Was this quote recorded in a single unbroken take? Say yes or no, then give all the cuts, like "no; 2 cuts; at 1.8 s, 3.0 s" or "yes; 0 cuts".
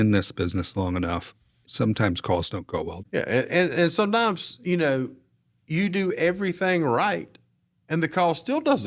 no; 1 cut; at 1.6 s